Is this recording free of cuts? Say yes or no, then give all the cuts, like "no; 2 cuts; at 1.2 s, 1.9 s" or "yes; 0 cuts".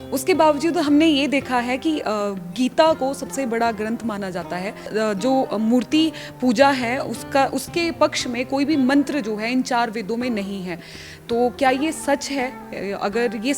no; 1 cut; at 4.8 s